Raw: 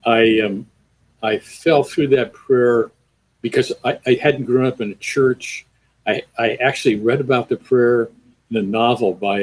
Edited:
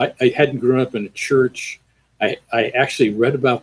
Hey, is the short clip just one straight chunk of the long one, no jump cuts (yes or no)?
yes